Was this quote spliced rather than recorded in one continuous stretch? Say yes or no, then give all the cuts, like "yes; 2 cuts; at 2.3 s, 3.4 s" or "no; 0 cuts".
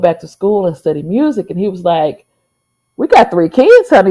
no; 0 cuts